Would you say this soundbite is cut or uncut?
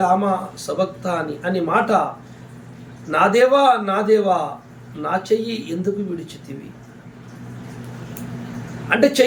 uncut